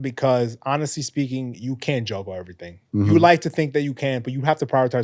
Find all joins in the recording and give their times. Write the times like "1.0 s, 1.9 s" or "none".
none